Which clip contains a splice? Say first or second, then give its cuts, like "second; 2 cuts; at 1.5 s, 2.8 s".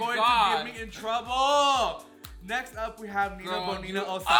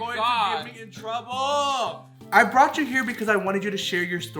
second; 1 cut; at 2.1 s